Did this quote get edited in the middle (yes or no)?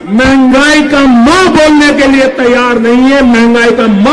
no